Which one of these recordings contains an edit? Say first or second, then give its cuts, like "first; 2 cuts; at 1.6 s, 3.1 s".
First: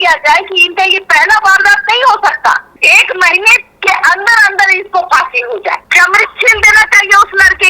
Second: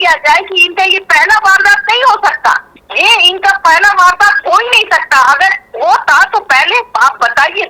first; 2 cuts; at 2.7 s, 5.9 s